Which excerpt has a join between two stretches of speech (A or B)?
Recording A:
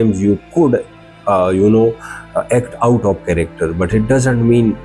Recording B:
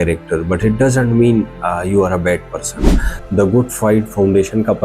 B